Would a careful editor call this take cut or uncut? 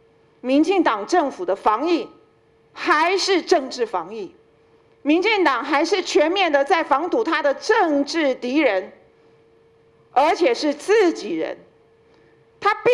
uncut